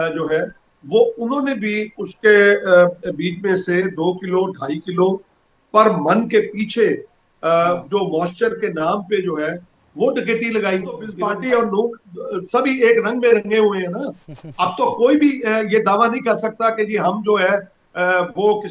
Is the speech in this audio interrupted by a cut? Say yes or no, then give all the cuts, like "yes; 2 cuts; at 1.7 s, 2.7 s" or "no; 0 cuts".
yes; 1 cut; at 11.0 s